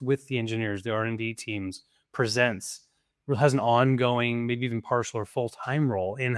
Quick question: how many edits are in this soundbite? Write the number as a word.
zero